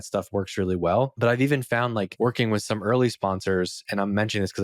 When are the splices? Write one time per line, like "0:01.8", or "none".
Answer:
0:01.1
0:02.1